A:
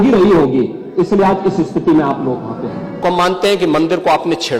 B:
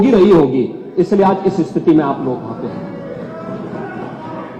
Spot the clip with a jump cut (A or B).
A